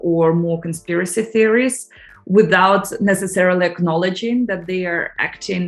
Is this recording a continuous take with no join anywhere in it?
yes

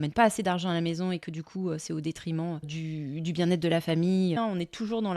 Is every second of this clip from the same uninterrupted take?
no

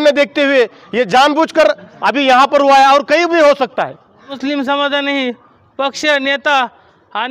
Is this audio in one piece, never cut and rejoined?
no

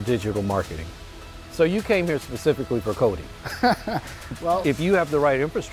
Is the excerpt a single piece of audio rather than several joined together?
no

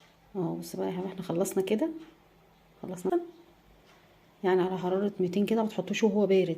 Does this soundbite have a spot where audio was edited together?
yes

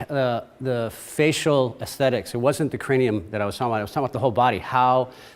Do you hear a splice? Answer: yes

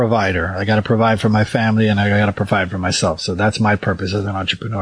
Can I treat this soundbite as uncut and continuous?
yes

